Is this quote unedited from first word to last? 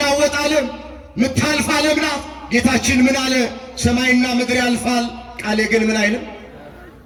yes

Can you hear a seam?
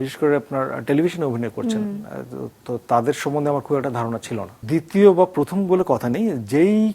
yes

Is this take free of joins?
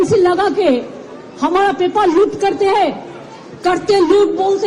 yes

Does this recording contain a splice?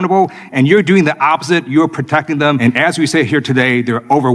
yes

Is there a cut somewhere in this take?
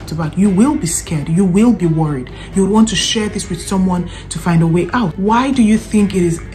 yes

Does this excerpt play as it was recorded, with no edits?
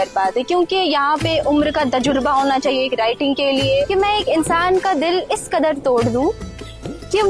no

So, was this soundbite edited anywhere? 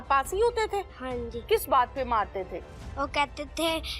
yes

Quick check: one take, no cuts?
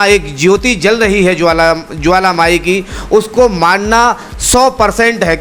yes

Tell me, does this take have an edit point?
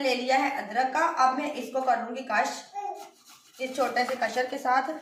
no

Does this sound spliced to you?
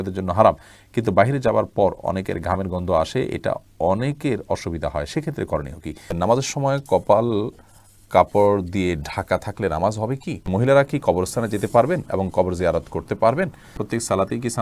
yes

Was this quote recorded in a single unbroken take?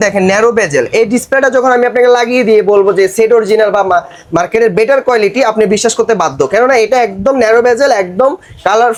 yes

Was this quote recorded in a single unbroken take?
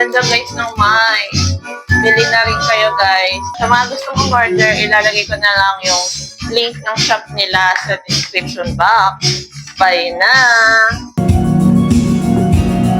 no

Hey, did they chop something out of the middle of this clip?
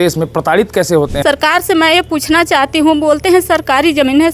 yes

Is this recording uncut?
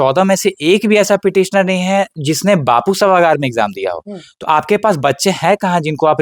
yes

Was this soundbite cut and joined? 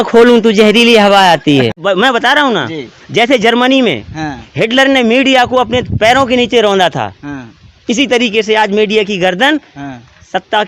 yes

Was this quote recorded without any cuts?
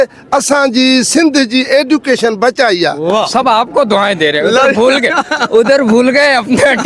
no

